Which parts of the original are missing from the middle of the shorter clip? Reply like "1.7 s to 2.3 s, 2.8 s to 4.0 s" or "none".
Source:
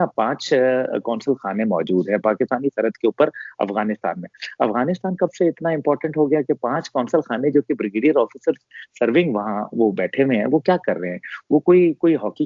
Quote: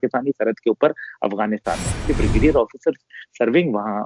4.4 s to 7.7 s